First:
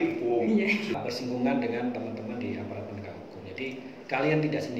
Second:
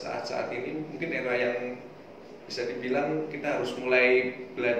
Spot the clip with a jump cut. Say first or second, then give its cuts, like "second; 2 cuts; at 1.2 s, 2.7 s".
first; 1 cut; at 0.9 s